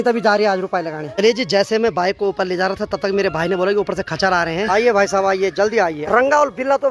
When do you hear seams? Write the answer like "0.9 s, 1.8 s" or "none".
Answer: 1.1 s, 4.7 s, 6.0 s